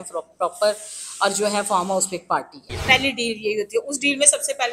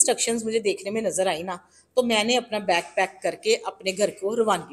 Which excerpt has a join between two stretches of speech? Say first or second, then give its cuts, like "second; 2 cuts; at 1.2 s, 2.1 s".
first; 1 cut; at 2.7 s